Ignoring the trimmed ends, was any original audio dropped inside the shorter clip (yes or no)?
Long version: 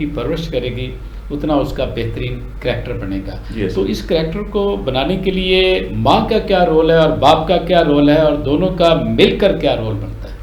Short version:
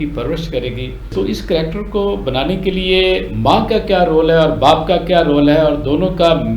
yes